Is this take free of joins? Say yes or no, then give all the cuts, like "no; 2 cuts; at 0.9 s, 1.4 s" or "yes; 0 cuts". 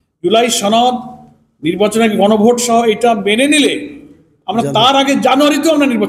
yes; 0 cuts